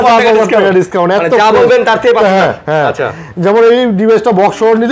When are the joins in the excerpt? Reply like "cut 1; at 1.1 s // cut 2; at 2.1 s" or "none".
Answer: none